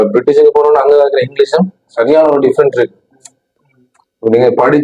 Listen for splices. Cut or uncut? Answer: cut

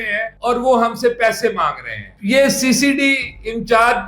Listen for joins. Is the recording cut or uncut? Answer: cut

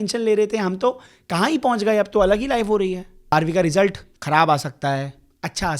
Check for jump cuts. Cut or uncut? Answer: cut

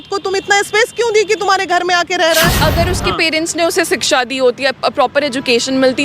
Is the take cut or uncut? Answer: cut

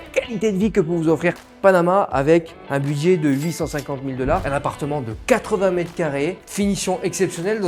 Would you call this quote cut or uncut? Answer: cut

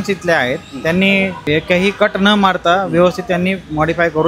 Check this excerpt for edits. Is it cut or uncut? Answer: cut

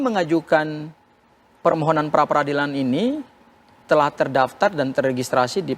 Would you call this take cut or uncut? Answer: uncut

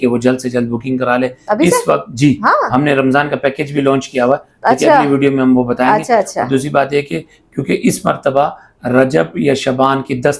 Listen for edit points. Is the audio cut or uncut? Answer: uncut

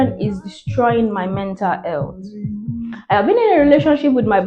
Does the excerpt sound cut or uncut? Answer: uncut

